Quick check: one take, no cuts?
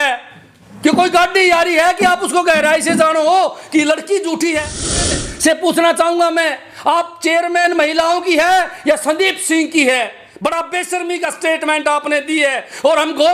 no; 1 cut; at 5.2 s

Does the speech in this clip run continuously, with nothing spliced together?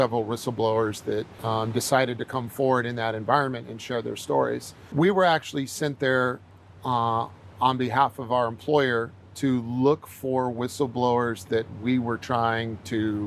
no; 2 cuts; at 1.3 s, 4.8 s

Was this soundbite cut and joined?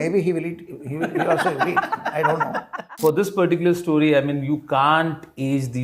yes; 1 cut; at 2.9 s

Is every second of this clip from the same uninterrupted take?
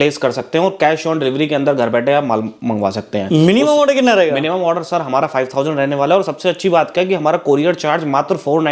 yes; 0 cuts

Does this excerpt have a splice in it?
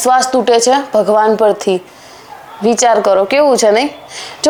no; 0 cuts

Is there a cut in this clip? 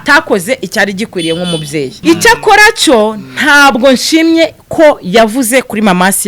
yes; 1 cut; at 1.9 s

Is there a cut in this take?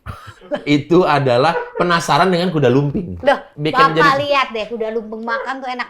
yes; 1 cut; at 3.5 s

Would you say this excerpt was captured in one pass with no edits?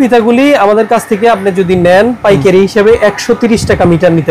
yes; 0 cuts

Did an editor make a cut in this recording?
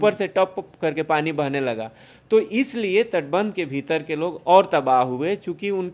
no; 0 cuts

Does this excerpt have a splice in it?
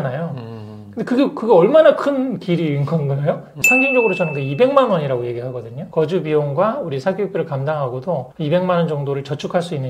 yes; 1 cut; at 3.5 s

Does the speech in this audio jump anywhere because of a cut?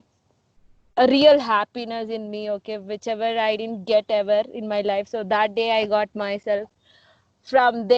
no; 0 cuts

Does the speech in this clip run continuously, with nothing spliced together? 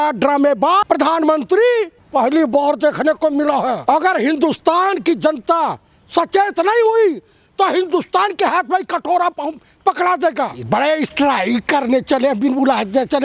no; 4 cuts; at 0.8 s, 2.0 s, 3.8 s, 10.6 s

